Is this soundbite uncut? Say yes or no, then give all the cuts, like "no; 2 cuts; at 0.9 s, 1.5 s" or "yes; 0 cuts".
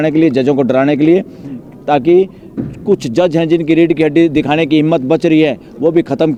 yes; 0 cuts